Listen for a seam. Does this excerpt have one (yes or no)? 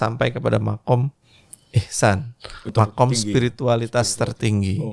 yes